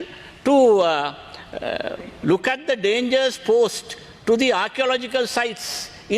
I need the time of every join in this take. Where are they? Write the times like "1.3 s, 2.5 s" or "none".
none